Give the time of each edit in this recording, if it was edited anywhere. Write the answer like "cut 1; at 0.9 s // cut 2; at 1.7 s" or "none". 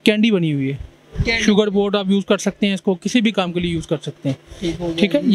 none